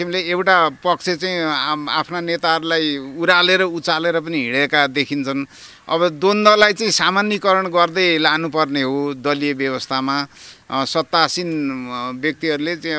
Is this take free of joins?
yes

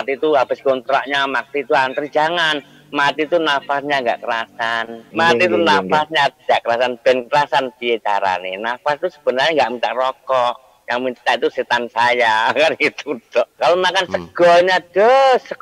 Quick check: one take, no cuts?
no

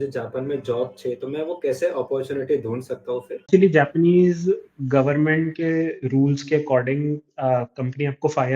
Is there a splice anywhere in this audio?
yes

